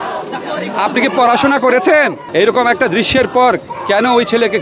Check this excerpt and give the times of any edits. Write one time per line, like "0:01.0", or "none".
0:02.2